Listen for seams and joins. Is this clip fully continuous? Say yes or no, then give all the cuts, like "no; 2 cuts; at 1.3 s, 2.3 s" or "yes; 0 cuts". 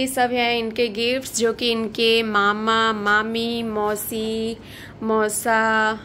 yes; 0 cuts